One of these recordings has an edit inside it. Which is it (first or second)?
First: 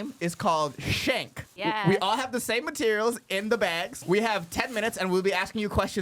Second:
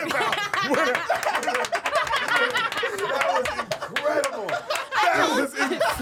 first